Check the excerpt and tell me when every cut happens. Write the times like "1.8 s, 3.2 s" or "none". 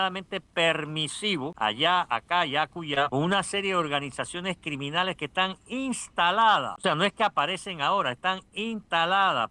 1.5 s, 3.1 s, 6.7 s